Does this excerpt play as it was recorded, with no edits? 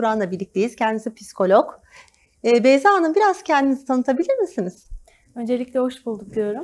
yes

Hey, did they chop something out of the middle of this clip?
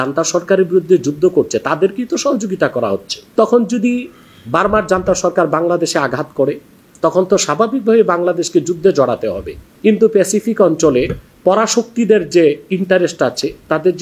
yes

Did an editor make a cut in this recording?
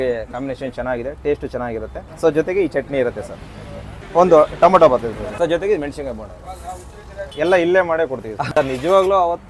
yes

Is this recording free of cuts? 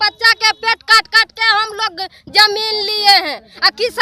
yes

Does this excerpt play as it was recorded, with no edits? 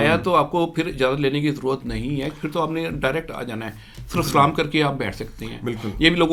yes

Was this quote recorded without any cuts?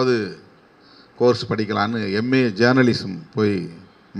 yes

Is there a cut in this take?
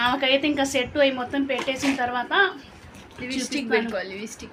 no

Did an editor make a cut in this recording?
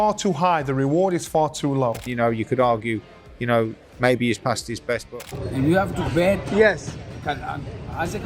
yes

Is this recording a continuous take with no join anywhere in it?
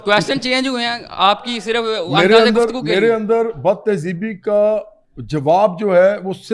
yes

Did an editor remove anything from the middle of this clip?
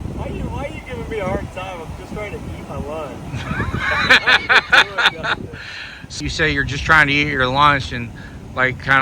yes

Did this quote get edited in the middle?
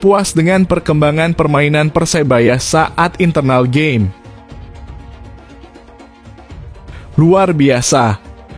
yes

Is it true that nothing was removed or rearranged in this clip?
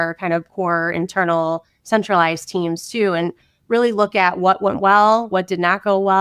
yes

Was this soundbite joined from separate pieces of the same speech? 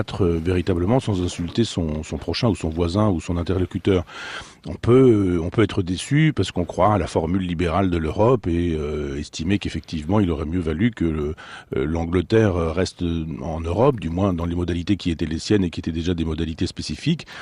yes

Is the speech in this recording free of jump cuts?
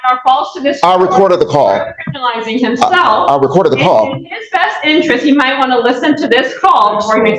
yes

